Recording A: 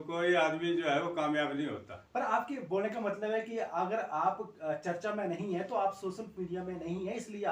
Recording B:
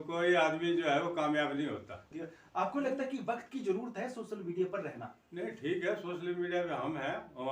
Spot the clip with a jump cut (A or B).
B